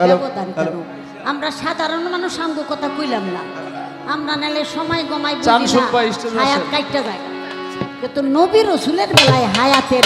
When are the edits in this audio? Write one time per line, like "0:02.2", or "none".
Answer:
none